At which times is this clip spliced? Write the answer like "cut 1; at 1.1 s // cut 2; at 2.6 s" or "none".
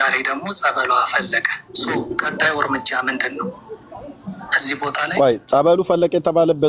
none